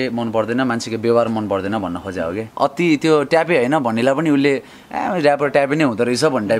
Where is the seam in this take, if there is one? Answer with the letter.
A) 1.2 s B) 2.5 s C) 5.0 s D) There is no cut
B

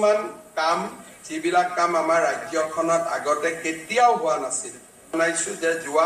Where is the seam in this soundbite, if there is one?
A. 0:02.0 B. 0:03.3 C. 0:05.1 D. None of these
C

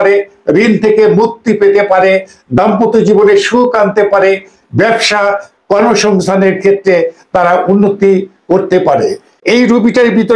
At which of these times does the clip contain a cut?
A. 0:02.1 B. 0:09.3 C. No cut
B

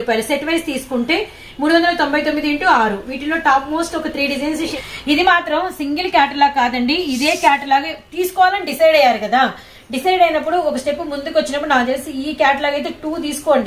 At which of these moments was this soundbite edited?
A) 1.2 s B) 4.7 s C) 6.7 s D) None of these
B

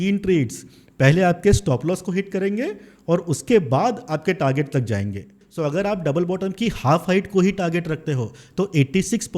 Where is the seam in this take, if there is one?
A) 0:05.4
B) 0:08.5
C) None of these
A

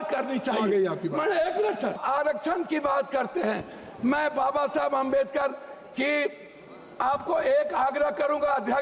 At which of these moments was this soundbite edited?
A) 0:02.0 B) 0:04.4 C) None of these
A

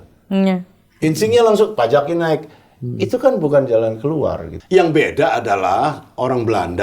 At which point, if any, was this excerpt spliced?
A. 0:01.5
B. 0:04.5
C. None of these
B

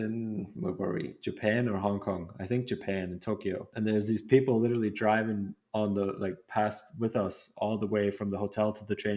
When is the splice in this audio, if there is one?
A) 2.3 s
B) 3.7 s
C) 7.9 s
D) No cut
B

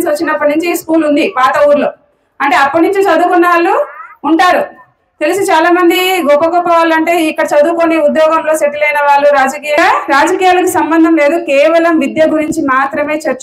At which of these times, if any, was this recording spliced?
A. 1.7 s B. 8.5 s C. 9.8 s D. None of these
C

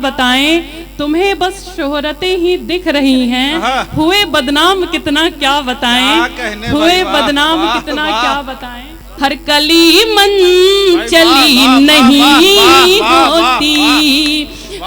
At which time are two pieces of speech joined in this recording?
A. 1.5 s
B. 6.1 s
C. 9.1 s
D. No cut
C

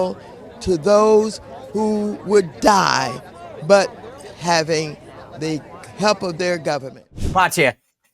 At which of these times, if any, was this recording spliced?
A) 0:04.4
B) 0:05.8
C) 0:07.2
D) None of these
C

